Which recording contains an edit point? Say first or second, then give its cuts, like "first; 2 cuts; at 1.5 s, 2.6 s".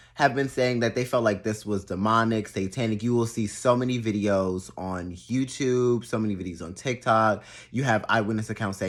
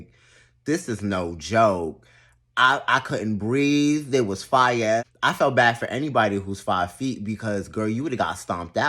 second; 1 cut; at 5.1 s